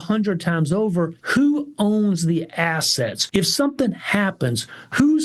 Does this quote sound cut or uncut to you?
cut